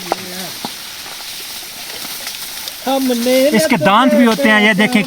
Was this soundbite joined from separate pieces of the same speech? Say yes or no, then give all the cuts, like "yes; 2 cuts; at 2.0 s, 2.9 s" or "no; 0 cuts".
no; 0 cuts